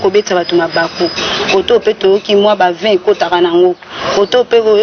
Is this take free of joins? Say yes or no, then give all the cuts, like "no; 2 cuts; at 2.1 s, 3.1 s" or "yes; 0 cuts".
yes; 0 cuts